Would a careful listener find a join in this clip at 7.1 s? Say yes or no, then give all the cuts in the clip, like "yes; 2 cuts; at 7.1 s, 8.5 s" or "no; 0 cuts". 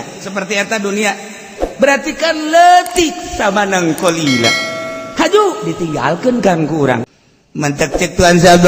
yes; 1 cut; at 7.1 s